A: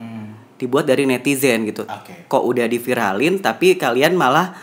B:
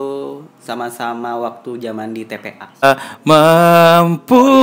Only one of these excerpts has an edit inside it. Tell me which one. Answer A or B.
B